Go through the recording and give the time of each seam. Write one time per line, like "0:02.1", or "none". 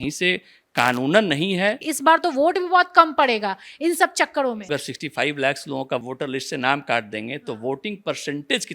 0:01.8
0:04.7